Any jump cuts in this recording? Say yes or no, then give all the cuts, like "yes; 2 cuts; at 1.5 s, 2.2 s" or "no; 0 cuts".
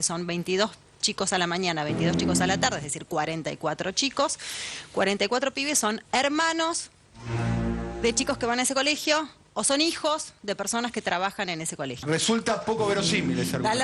no; 0 cuts